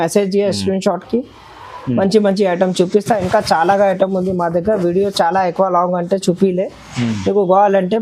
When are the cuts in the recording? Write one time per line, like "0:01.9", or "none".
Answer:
none